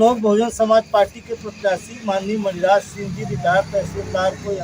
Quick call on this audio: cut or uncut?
uncut